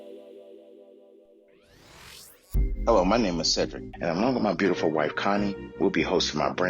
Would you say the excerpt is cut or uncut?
cut